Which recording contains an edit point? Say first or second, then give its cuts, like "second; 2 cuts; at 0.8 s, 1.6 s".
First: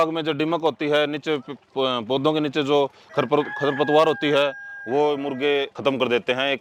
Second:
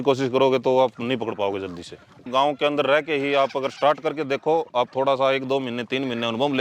second; 1 cut; at 2.2 s